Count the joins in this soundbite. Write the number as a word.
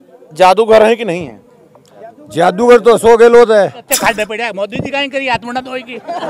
one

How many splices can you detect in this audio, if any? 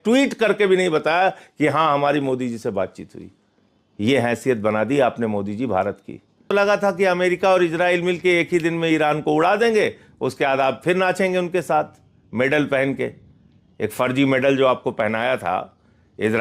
one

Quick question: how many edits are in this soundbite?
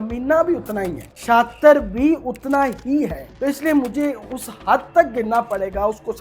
two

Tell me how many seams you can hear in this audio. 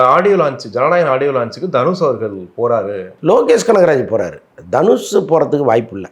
one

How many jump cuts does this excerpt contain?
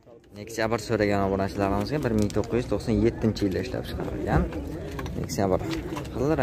zero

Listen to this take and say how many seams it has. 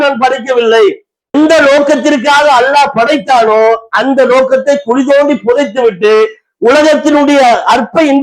one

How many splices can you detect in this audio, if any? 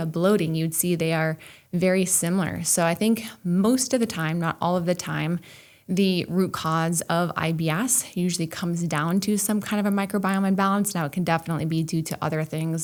zero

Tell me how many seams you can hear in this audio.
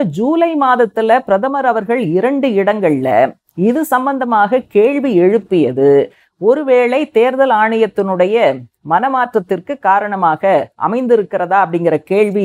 zero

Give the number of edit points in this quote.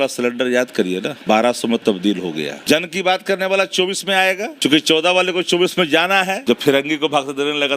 four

